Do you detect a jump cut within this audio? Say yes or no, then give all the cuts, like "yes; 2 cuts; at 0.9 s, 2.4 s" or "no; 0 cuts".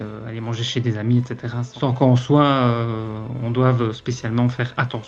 yes; 1 cut; at 1.6 s